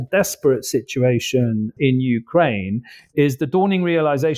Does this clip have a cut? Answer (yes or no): no